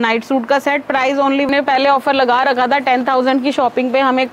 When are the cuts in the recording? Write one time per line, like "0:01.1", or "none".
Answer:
0:01.5